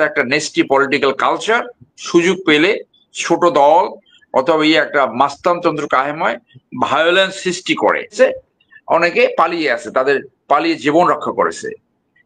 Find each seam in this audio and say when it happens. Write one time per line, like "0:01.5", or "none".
0:08.1